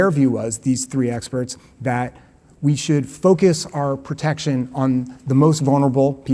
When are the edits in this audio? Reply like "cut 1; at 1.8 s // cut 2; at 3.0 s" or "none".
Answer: none